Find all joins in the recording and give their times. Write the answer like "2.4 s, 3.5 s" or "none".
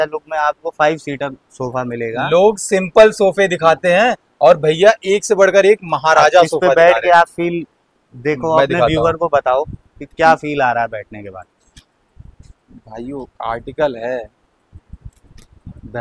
none

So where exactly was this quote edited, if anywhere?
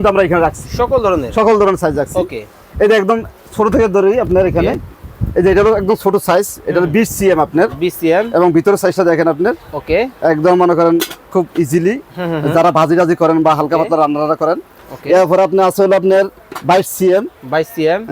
none

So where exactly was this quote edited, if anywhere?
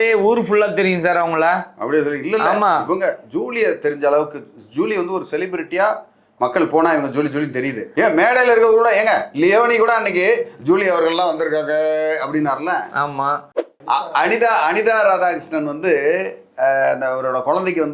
13.6 s

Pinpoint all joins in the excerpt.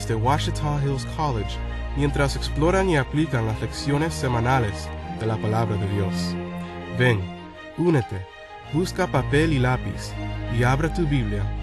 8.9 s

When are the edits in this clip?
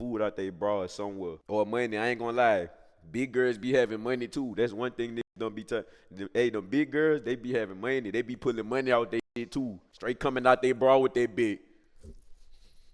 1.4 s, 9.9 s

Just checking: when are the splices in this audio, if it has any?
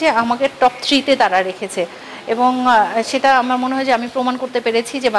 none

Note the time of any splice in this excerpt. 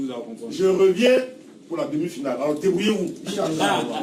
none

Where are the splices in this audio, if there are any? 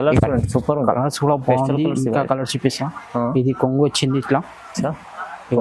none

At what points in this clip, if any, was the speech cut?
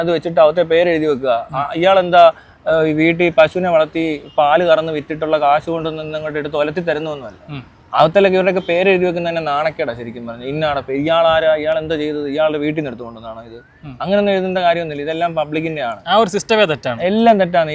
none

